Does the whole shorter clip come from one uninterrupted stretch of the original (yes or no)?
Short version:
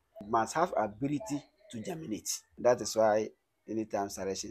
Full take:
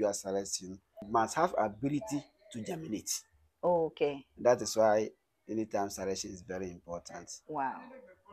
no